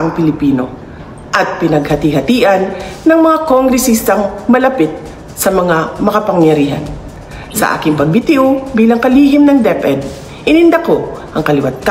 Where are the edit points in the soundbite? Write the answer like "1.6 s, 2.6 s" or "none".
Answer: 7.0 s